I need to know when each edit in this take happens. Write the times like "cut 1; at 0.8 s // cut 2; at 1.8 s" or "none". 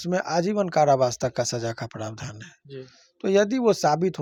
none